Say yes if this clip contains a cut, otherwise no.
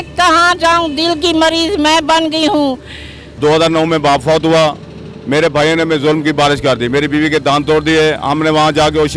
yes